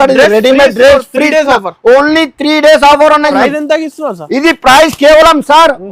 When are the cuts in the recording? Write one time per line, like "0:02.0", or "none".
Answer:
0:03.3